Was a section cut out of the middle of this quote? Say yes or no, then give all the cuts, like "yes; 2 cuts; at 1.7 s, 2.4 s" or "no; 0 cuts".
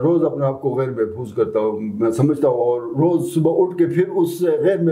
no; 0 cuts